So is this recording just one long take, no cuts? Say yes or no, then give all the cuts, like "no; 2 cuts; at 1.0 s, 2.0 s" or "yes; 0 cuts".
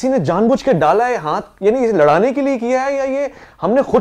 yes; 0 cuts